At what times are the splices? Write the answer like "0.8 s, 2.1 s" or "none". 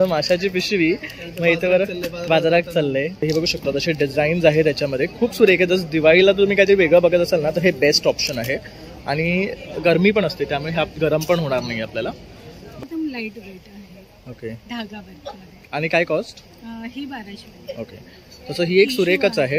3.2 s, 12.9 s